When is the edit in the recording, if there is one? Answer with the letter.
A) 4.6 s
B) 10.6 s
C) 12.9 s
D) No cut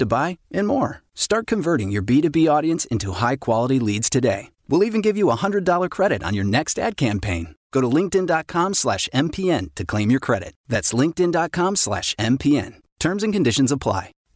D